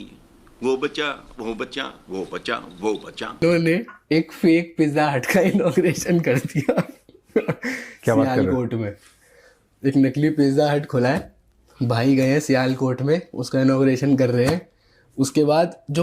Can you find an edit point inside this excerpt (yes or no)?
yes